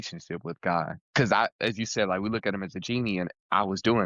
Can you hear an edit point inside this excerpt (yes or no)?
yes